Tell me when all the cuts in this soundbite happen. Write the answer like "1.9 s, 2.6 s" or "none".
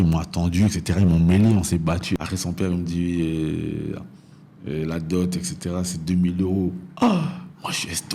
2.2 s